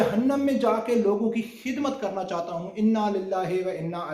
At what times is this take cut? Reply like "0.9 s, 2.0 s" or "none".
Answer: none